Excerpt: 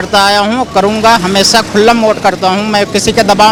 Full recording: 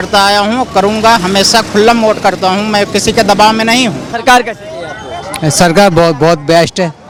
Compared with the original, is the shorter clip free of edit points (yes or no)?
yes